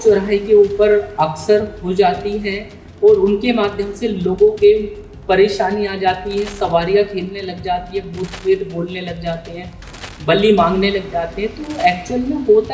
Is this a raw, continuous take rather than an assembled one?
yes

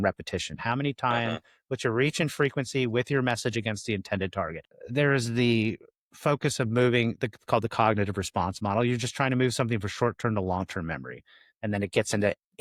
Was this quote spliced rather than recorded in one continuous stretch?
no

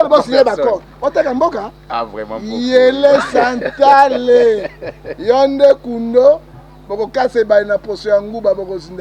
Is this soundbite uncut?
yes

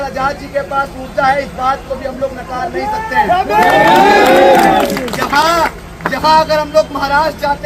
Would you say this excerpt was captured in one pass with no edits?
yes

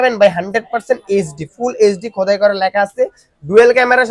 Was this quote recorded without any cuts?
yes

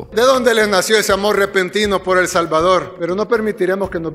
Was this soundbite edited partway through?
no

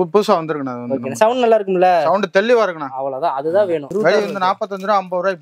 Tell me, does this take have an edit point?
yes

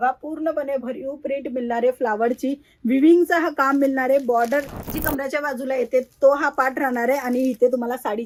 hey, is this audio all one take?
yes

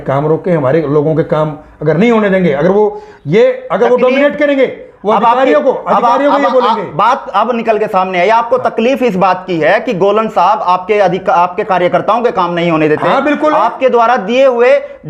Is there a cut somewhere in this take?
no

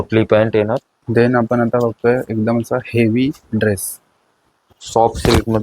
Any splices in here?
yes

